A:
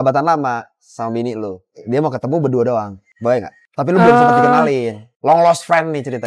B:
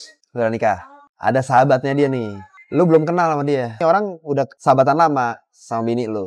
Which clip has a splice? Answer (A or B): B